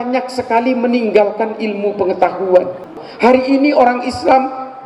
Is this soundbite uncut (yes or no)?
no